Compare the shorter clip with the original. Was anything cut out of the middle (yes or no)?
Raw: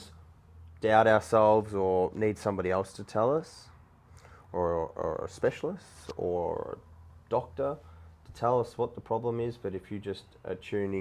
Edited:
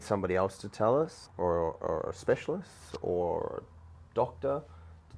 yes